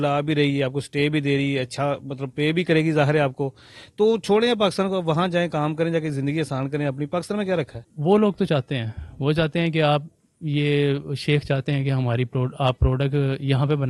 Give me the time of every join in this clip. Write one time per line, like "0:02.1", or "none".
0:07.8